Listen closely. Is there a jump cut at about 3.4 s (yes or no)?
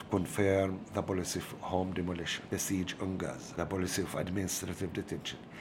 yes